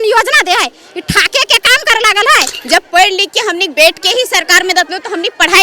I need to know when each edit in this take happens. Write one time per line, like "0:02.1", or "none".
0:02.6